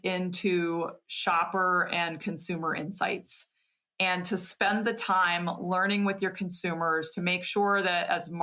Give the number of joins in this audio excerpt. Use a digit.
0